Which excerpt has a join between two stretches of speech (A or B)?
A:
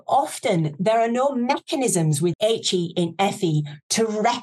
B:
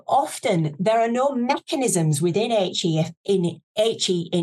A